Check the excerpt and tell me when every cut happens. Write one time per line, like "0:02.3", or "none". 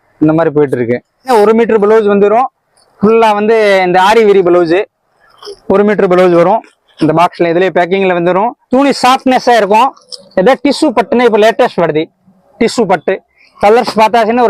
0:01.3
0:08.6